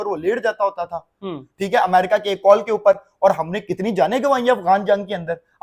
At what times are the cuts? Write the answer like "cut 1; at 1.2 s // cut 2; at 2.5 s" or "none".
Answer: none

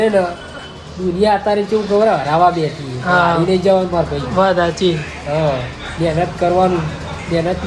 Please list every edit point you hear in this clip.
none

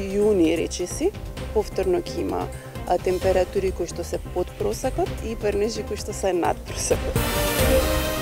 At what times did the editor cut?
cut 1; at 7.2 s

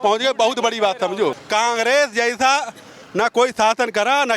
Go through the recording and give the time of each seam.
cut 1; at 1.4 s

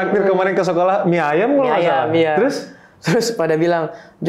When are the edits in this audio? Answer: none

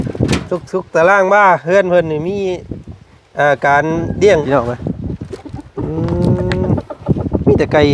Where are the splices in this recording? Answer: cut 1; at 4.4 s

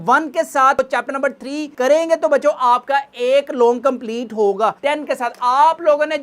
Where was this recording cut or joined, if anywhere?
cut 1; at 4.8 s

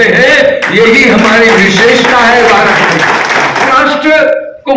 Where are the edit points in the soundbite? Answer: cut 1; at 3.7 s

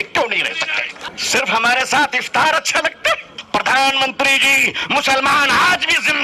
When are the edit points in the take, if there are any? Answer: cut 1; at 1.0 s // cut 2; at 3.3 s

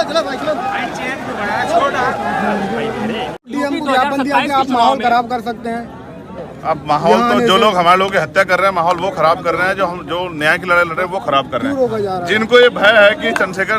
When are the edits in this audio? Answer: cut 1; at 3.4 s

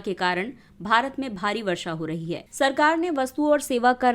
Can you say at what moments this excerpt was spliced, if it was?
cut 1; at 2.4 s

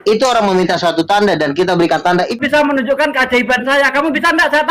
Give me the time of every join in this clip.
cut 1; at 2.4 s

